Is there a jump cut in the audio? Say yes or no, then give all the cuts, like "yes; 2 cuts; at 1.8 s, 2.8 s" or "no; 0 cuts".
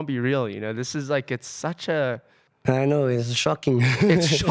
yes; 1 cut; at 2.4 s